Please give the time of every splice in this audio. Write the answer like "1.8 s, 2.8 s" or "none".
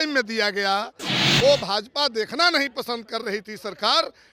1.2 s